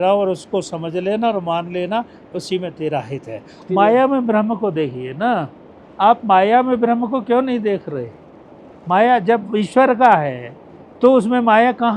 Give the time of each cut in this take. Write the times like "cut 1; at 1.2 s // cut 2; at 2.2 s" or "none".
cut 1; at 3.5 s